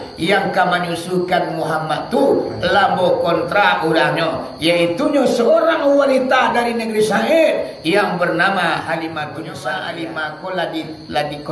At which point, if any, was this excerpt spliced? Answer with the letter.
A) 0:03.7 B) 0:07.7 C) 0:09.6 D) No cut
C